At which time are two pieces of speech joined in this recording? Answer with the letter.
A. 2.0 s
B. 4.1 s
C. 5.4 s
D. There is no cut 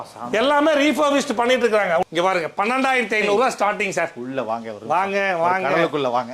A